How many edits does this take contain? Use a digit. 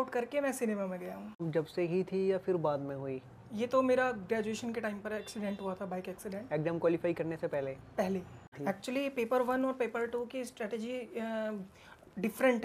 2